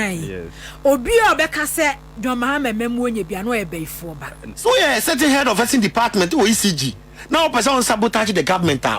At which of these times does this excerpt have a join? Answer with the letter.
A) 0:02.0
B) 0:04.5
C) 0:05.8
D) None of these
B